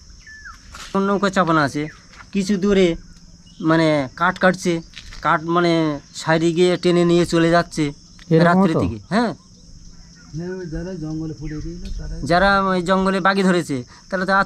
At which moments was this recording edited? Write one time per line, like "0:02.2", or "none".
0:00.9